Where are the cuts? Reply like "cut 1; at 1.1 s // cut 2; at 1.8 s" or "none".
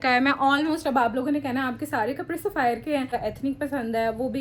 cut 1; at 3.1 s